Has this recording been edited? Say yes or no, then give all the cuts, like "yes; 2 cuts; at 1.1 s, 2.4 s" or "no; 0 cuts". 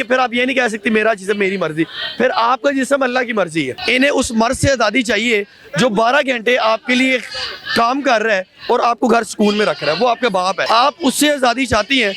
yes; 2 cuts; at 3.8 s, 10.6 s